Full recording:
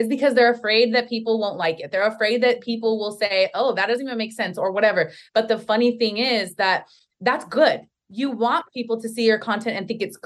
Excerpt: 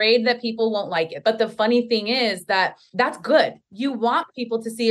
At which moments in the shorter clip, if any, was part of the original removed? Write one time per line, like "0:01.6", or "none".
0:01.1
0:02.8
0:03.6